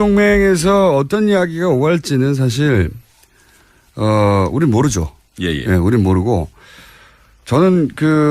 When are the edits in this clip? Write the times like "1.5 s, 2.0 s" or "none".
1.1 s